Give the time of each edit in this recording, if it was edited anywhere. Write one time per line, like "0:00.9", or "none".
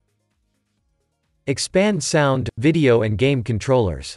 0:01.4